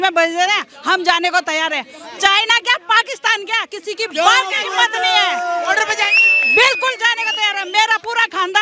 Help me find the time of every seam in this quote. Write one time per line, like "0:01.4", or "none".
none

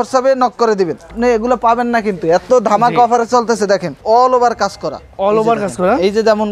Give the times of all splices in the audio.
0:01.1
0:04.0

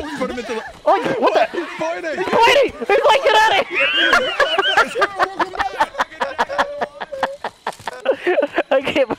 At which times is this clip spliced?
0:07.9

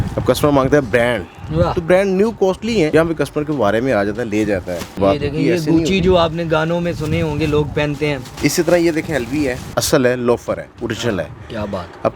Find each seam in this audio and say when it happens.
0:02.9
0:05.0
0:08.3
0:09.6

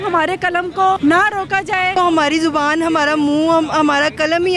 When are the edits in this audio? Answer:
0:01.0
0:02.0

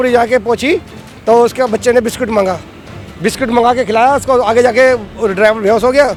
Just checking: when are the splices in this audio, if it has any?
none

